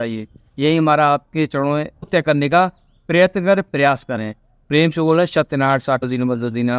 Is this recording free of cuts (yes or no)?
no